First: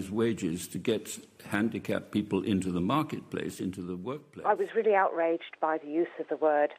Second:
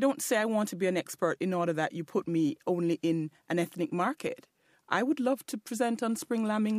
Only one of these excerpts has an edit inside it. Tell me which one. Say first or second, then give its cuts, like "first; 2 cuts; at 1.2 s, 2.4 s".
first; 1 cut; at 4.3 s